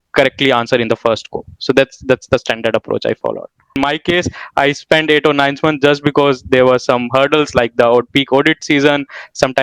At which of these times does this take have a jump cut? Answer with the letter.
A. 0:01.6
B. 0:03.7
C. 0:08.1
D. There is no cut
B